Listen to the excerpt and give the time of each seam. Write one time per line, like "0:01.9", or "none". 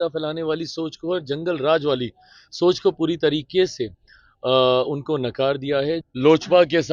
0:06.0